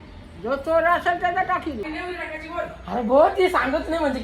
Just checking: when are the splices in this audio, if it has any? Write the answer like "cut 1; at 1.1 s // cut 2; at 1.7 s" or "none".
cut 1; at 1.9 s